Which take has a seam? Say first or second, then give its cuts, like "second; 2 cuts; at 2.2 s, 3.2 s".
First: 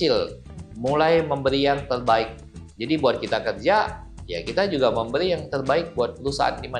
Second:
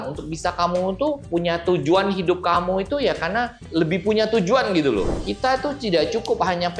second; 3 cuts; at 1.2 s, 3.6 s, 5.2 s